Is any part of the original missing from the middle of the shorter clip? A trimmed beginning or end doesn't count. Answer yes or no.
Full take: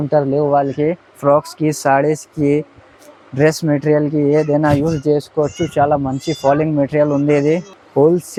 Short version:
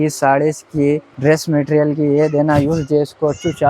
yes